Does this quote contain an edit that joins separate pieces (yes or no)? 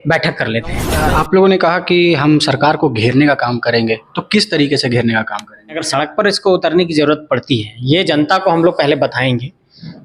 yes